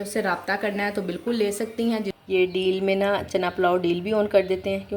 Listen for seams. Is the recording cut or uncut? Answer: cut